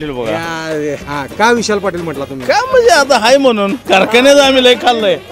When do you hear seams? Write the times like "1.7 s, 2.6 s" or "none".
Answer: 1.0 s